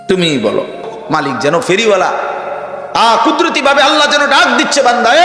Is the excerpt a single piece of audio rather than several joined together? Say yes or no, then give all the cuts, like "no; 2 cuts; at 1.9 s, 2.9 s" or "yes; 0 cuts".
no; 1 cut; at 1.0 s